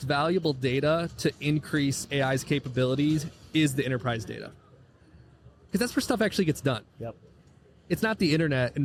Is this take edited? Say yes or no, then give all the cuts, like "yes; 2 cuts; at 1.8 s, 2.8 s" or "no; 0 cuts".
no; 0 cuts